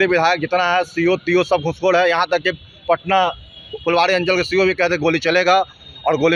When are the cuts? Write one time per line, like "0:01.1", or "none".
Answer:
none